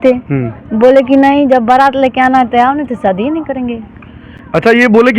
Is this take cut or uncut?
uncut